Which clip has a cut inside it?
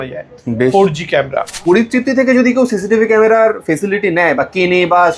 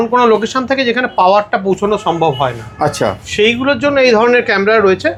first; 1 cut; at 1.5 s

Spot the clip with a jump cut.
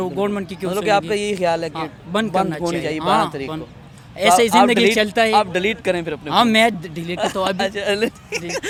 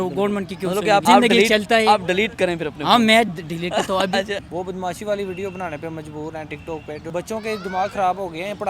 second; 3 cuts; at 1.0 s, 4.4 s, 7.1 s

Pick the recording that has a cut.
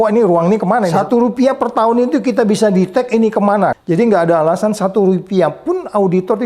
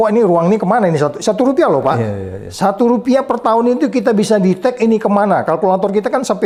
first; 2 cuts; at 0.9 s, 3.8 s

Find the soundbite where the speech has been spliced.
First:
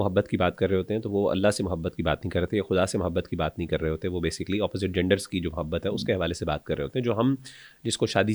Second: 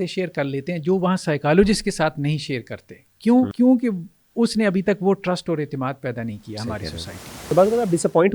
second; 2 cuts; at 3.5 s, 7.5 s

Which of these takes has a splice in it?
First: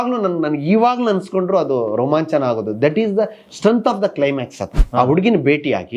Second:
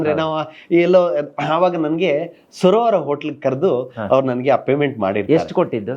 first; 1 cut; at 4.7 s

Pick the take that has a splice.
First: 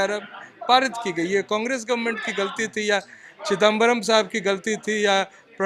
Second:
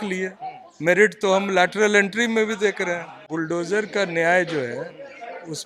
second; 1 cut; at 3.2 s

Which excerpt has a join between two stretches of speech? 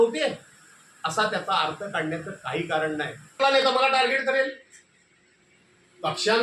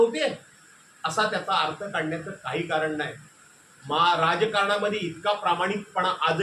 first; 1 cut; at 3.3 s

